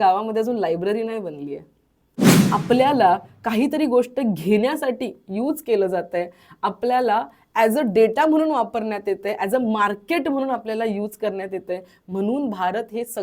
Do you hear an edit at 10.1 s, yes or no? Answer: no